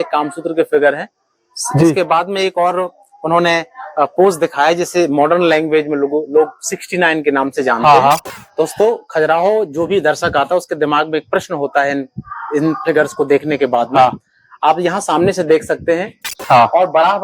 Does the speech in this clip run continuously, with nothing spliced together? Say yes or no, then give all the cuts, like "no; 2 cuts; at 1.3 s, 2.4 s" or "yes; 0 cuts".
no; 2 cuts; at 8.4 s, 16.3 s